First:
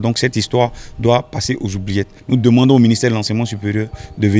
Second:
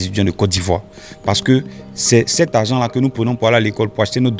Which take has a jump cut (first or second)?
first